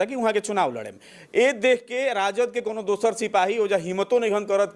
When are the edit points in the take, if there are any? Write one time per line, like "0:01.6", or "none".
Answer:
none